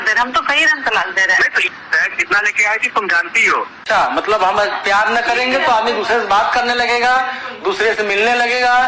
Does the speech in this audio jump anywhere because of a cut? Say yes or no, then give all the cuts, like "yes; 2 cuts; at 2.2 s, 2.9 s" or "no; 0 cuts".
yes; 2 cuts; at 1.7 s, 3.8 s